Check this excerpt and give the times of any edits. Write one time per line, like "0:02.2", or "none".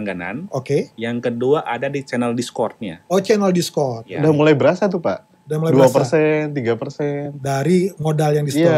0:04.1